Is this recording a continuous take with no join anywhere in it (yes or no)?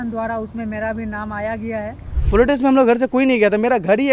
no